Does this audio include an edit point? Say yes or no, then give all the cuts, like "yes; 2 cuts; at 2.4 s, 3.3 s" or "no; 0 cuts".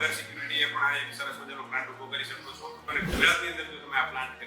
yes; 1 cut; at 2.9 s